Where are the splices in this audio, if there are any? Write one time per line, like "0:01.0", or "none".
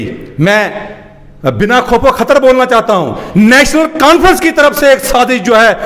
none